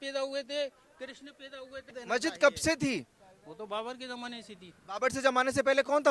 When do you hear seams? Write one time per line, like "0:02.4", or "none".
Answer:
0:01.9